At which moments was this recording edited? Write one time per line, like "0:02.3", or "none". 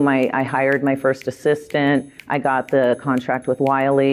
none